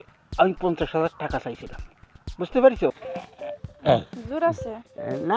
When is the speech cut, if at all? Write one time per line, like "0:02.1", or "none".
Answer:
0:03.0